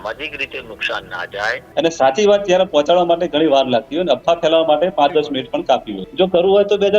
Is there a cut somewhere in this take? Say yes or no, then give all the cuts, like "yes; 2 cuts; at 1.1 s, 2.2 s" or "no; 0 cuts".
yes; 2 cuts; at 1.6 s, 6.0 s